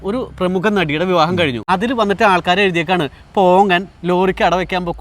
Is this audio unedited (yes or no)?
no